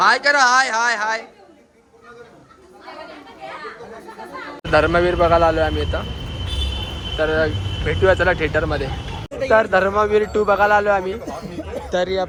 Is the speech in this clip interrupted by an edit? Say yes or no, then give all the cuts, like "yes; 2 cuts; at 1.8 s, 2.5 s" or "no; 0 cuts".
no; 0 cuts